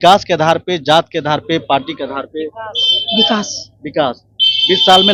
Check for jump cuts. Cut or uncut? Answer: uncut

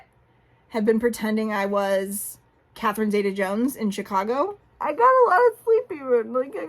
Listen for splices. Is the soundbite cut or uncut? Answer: cut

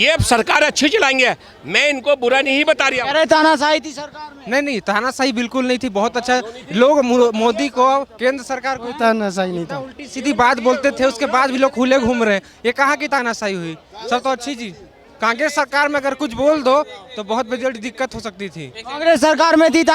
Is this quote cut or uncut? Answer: uncut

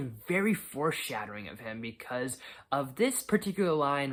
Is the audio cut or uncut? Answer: uncut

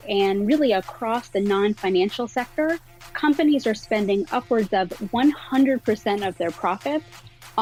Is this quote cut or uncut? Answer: uncut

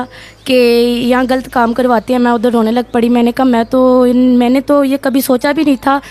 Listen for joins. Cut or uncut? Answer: uncut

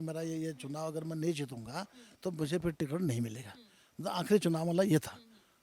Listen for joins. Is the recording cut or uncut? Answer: uncut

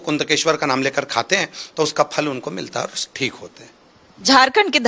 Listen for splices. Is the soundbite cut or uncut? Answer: uncut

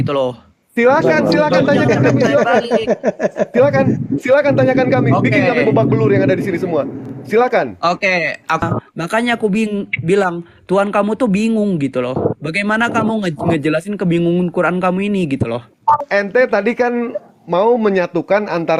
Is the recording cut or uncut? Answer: cut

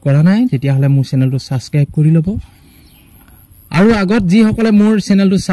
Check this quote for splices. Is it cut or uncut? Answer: uncut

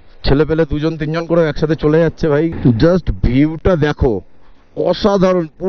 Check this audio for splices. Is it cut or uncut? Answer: cut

